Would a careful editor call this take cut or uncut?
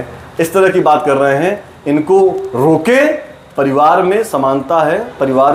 uncut